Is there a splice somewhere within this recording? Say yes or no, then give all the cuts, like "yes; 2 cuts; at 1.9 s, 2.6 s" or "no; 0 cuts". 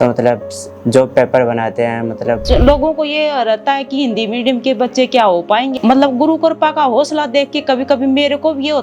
yes; 2 cuts; at 2.4 s, 5.7 s